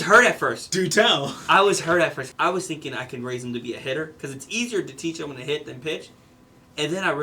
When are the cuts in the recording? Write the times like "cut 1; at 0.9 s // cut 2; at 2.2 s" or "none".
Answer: cut 1; at 2.2 s

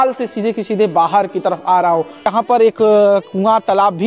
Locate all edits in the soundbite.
cut 1; at 2.2 s

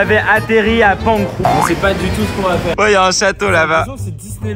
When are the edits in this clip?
cut 1; at 1.3 s // cut 2; at 2.7 s

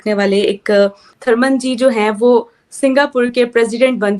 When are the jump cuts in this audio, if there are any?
cut 1; at 1.1 s

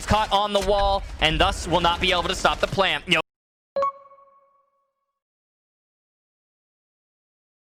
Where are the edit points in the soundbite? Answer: none

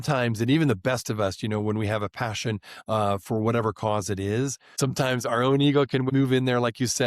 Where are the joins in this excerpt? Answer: cut 1; at 6.1 s

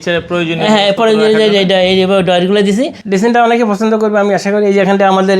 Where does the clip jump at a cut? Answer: cut 1; at 3.0 s

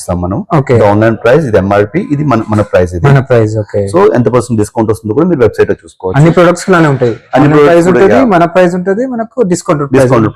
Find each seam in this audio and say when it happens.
none

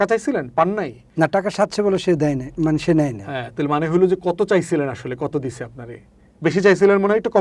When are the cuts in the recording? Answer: cut 1; at 1.0 s

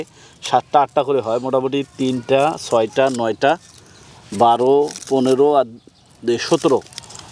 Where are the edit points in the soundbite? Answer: none

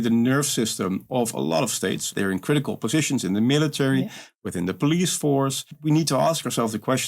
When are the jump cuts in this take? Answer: cut 1; at 2.1 s // cut 2; at 5.7 s

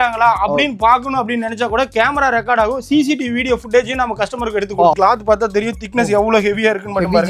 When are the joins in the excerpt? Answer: cut 1; at 4.9 s

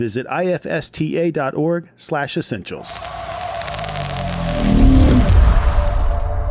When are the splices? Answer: cut 1; at 2.9 s

